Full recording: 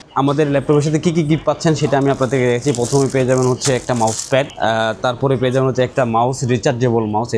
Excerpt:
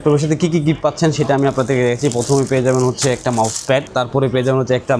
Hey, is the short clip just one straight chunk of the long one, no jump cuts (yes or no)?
no